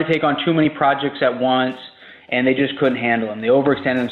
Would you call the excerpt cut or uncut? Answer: uncut